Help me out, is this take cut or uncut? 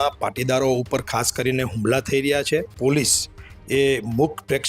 cut